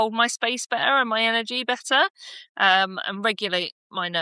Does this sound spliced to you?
no; 0 cuts

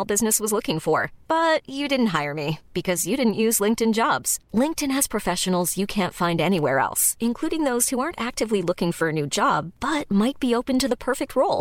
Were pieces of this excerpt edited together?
no; 0 cuts

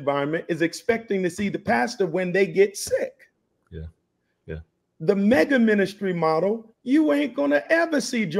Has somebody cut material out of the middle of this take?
no; 0 cuts

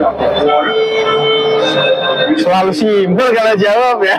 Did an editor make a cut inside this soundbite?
no; 0 cuts

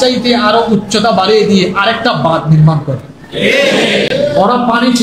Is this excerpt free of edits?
yes; 0 cuts

